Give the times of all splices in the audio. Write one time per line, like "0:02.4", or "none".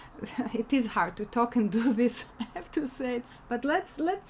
0:03.3